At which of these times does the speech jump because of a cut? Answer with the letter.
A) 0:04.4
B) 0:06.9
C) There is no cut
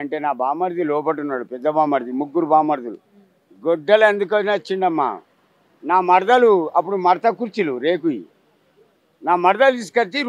C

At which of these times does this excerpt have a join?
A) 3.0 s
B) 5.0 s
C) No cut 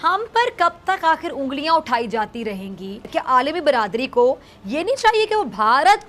A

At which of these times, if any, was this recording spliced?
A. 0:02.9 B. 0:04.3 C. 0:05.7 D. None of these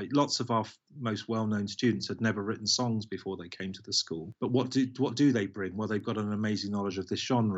B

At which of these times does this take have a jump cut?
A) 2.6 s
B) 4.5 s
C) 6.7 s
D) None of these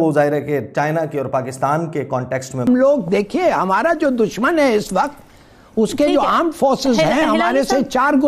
A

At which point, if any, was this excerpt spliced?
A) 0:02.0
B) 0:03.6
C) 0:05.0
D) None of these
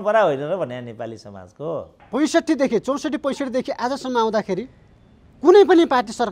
A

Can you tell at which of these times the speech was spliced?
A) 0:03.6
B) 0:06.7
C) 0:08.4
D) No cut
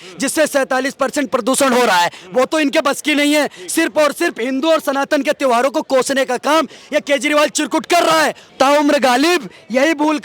C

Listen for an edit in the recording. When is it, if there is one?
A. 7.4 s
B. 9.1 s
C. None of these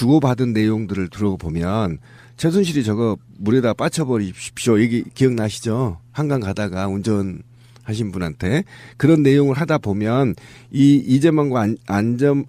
A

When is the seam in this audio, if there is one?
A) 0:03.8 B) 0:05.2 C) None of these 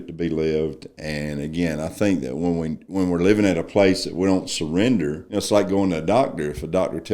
B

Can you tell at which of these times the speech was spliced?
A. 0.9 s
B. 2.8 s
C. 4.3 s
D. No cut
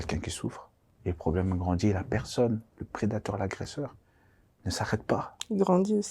A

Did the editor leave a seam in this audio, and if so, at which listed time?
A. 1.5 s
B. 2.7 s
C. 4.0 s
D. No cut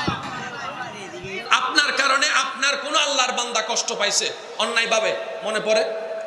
A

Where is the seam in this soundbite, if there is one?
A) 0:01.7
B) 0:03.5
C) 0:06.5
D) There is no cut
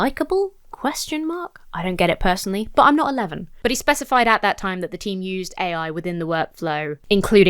B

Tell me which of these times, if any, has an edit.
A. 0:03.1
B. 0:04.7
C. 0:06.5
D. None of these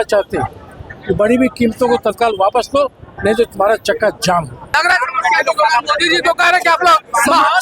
B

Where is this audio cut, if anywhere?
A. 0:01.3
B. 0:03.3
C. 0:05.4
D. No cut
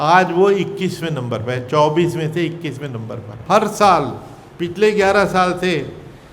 B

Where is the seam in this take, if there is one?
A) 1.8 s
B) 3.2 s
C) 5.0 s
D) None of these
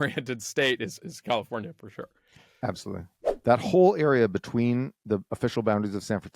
B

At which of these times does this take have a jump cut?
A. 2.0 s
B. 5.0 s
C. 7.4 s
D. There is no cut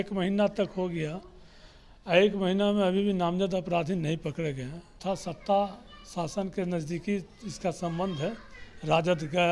B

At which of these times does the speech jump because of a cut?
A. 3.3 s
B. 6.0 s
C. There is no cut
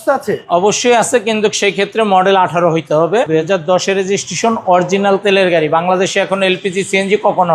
A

